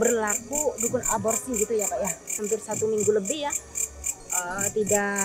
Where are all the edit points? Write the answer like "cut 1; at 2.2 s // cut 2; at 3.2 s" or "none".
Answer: cut 1; at 2.3 s